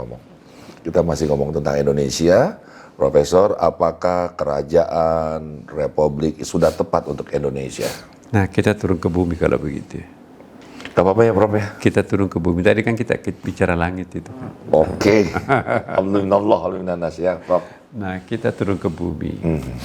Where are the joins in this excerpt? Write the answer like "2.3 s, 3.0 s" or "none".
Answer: none